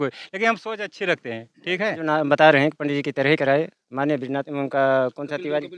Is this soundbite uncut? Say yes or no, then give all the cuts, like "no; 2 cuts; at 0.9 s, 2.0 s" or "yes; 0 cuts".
no; 1 cut; at 2.1 s